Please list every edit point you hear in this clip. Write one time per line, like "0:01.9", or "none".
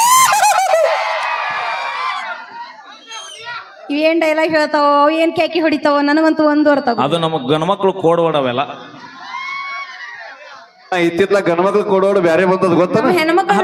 none